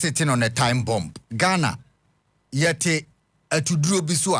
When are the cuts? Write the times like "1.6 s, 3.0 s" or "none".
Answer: 1.2 s